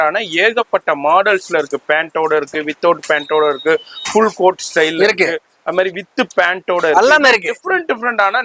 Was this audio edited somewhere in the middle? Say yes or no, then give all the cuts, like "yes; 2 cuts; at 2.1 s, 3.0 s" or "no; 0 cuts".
no; 0 cuts